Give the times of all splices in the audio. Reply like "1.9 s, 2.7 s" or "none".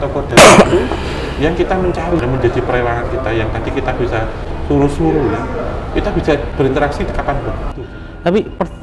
2.2 s, 7.7 s

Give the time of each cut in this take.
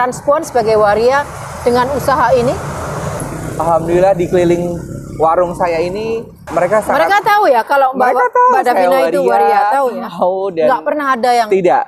3.2 s, 6.4 s

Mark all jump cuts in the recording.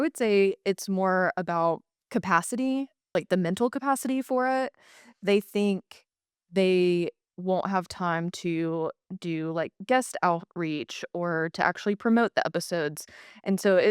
1.9 s, 3.0 s

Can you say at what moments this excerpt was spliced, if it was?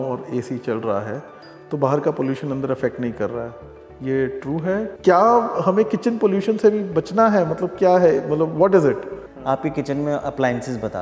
4.9 s, 9.4 s

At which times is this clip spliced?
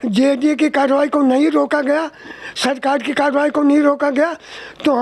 none

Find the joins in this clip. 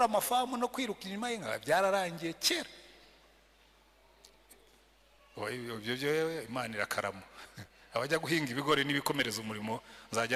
none

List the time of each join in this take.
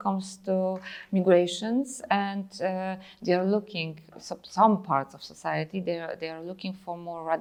none

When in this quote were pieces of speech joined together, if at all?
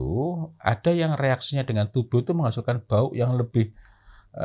none

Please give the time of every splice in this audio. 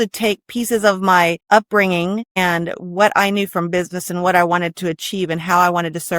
1.4 s, 2.3 s

